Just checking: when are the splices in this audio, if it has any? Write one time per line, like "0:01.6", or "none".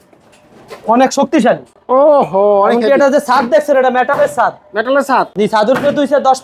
none